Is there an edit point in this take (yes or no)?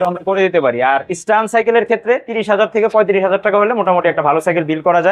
no